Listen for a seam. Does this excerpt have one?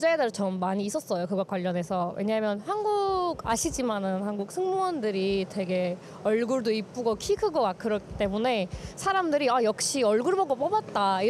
no; 0 cuts

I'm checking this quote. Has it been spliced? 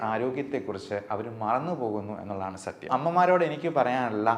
yes; 1 cut; at 2.9 s

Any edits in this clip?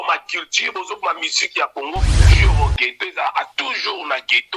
yes; 1 cut; at 2.3 s

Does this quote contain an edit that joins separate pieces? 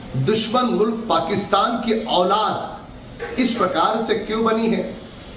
no; 0 cuts

